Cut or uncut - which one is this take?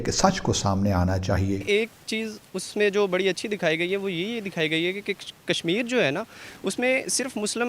cut